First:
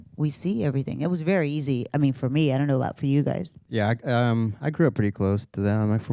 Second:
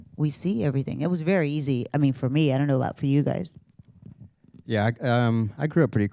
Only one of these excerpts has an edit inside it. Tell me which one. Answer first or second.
first